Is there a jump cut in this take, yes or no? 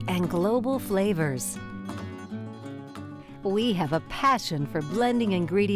no